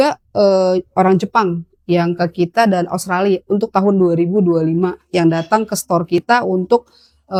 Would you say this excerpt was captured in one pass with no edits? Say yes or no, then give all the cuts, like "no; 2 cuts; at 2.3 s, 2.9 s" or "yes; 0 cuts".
yes; 0 cuts